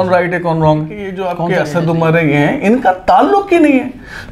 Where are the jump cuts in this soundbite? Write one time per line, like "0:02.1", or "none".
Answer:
0:01.2